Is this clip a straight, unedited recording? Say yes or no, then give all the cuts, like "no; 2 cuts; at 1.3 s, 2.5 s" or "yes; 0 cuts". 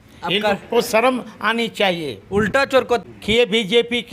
no; 1 cut; at 3.0 s